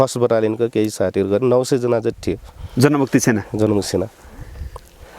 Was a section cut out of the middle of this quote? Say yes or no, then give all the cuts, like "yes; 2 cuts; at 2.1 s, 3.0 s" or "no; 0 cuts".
no; 0 cuts